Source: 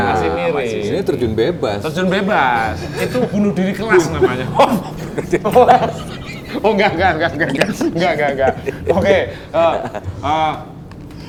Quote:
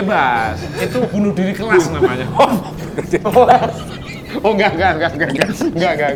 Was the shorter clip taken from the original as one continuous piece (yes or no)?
yes